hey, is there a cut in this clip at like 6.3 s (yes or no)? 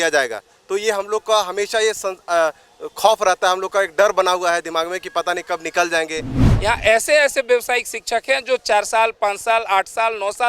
yes